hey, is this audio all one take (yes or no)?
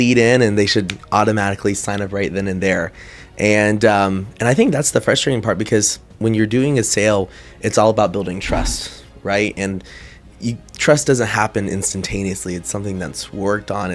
yes